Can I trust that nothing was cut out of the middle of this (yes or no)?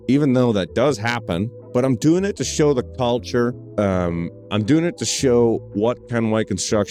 yes